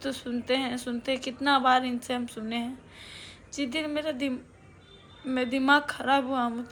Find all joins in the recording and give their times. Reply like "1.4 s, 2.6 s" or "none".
none